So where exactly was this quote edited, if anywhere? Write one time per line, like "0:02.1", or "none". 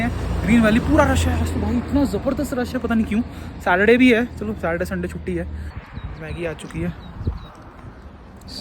0:05.7